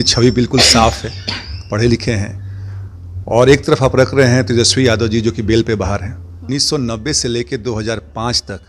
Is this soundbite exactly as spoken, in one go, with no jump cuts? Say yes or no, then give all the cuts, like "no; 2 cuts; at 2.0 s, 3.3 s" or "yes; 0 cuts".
no; 1 cut; at 6.3 s